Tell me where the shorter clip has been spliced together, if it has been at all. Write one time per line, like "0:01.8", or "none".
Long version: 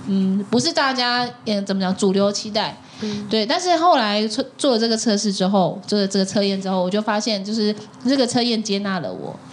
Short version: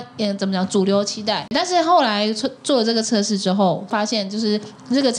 0:01.5
0:03.9